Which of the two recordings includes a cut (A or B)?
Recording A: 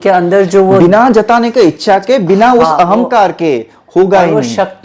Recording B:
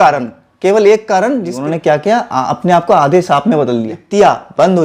B